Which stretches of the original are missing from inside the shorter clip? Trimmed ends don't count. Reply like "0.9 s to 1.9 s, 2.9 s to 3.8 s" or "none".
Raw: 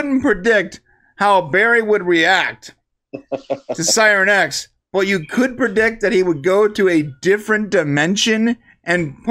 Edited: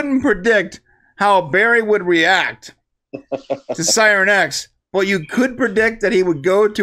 none